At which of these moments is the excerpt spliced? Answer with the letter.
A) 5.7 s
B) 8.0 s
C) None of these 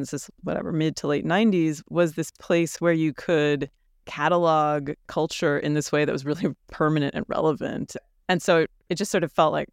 B